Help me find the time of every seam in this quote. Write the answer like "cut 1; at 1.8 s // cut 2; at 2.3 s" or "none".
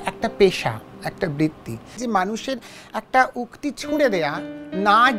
cut 1; at 2.0 s